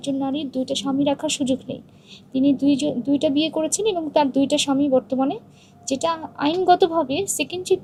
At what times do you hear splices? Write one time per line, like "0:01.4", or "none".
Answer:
none